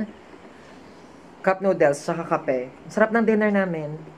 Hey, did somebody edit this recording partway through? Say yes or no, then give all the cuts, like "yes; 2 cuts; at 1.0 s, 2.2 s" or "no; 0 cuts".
no; 0 cuts